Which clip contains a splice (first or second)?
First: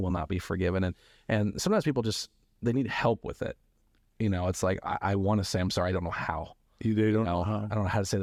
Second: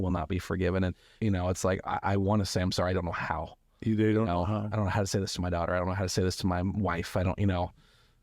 second